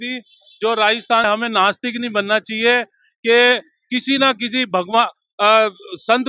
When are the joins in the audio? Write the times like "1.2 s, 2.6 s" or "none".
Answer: 1.2 s